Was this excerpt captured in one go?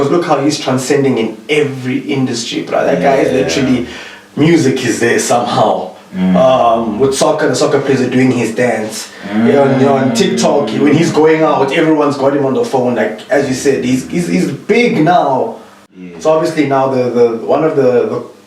no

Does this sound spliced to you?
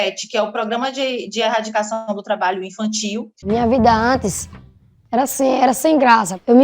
yes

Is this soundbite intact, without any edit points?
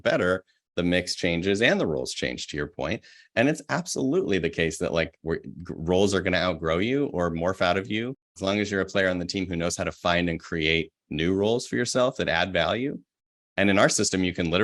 no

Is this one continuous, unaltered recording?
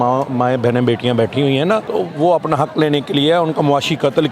no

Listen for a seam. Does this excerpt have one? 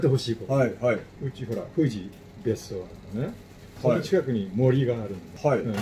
no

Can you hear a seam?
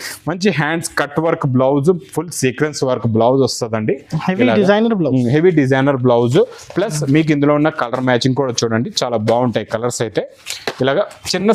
no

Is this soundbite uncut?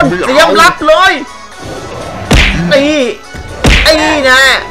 yes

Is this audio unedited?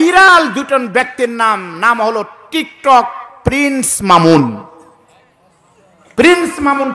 yes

